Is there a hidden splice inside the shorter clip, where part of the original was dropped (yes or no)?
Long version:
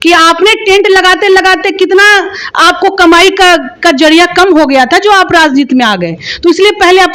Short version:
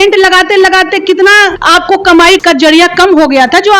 yes